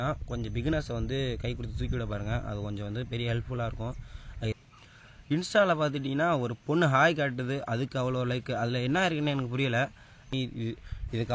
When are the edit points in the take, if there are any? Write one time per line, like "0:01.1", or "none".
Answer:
0:04.5
0:10.2